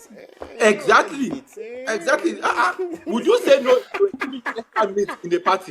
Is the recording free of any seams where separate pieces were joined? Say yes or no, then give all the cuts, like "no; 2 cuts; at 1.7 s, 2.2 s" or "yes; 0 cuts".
yes; 0 cuts